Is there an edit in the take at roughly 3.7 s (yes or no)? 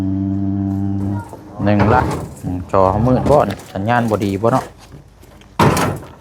no